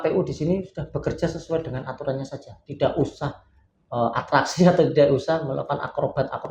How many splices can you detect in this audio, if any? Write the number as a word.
zero